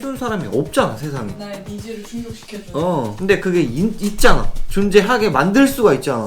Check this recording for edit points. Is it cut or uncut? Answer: cut